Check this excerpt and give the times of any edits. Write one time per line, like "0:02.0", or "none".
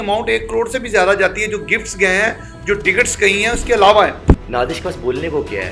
0:04.4